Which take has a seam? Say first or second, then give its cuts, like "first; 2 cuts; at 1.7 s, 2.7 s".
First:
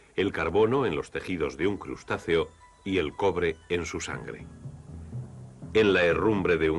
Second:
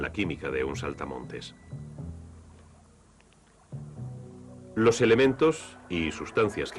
second; 1 cut; at 2.5 s